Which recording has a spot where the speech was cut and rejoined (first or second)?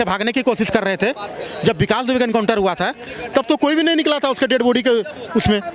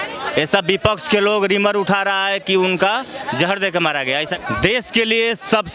second